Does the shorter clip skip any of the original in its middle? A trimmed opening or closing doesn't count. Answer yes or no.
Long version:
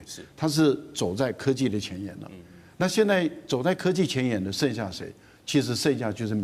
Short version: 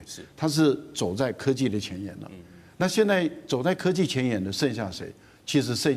no